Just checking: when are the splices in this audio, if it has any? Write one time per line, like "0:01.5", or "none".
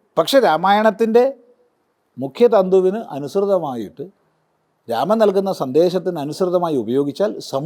none